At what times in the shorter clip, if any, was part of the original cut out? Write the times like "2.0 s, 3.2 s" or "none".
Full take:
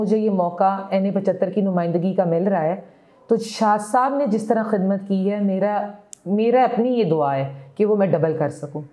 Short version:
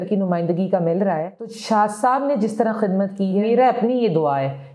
1.6 s, 3.4 s